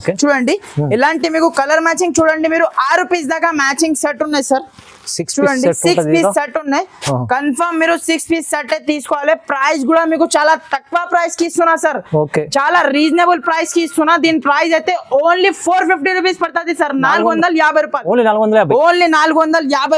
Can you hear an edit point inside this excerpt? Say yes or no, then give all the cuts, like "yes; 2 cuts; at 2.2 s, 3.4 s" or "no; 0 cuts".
no; 0 cuts